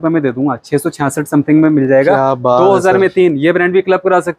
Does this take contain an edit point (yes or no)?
no